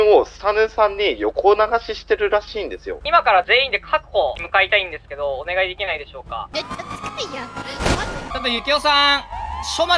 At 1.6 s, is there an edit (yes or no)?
no